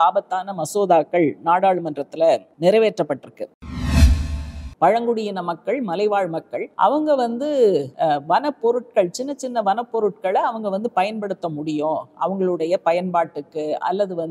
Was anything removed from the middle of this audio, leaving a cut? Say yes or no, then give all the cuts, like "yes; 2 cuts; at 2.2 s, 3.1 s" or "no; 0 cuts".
yes; 4 cuts; at 2.5 s, 4.1 s, 6.6 s, 7.9 s